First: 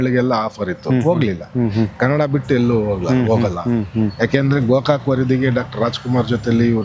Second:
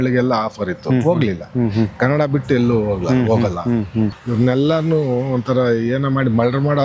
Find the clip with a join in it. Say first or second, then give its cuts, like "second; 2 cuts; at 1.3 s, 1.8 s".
second; 1 cut; at 4.1 s